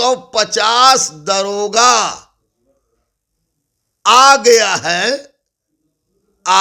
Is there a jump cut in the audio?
no; 0 cuts

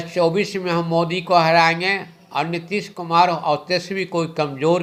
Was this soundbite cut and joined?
no; 0 cuts

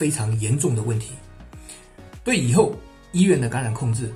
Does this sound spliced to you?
no; 0 cuts

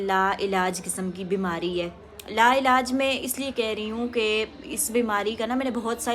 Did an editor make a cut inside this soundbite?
no; 0 cuts

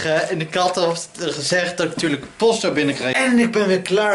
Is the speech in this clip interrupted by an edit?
yes; 1 cut; at 3.2 s

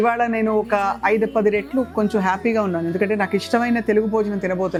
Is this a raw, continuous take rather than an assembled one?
yes; 0 cuts

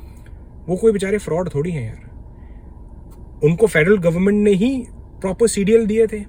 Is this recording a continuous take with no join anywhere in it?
yes; 0 cuts

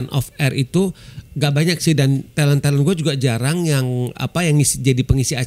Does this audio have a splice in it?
no; 0 cuts

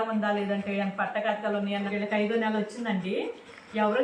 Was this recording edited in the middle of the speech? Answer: yes; 1 cut; at 1.9 s

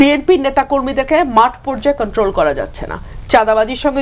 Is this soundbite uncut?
yes; 0 cuts

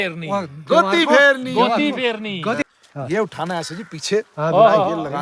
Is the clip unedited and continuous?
no; 1 cut; at 2.6 s

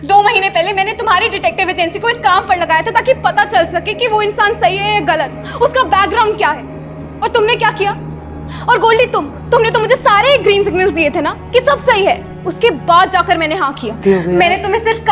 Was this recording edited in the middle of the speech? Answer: yes; 1 cut; at 14.0 s

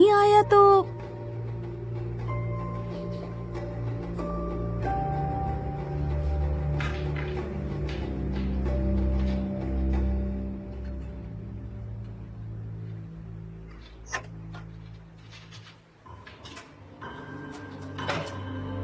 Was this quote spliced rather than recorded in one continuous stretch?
no; 0 cuts

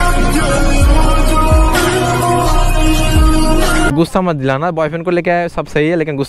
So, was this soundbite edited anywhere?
no; 0 cuts

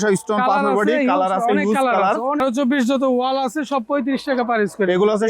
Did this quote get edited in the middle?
yes; 1 cut; at 2.4 s

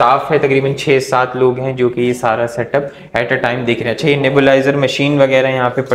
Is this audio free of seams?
yes; 0 cuts

